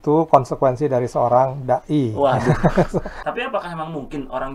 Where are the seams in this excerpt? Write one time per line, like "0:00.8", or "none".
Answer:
0:03.2